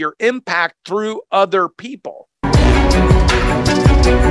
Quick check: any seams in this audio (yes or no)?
yes